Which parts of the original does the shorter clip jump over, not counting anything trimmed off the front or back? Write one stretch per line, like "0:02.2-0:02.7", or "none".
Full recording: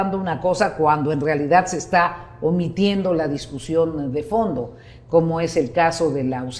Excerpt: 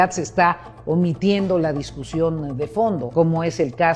0:04.6-0:05.0